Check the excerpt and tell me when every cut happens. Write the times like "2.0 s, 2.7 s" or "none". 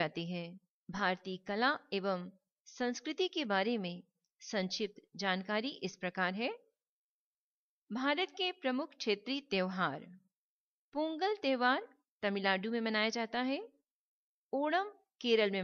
13.3 s